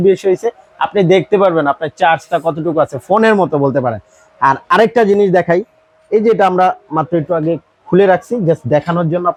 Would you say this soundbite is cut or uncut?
uncut